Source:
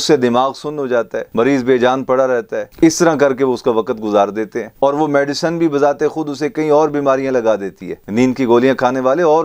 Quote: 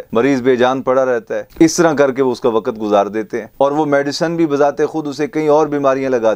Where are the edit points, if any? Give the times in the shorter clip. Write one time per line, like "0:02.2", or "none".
none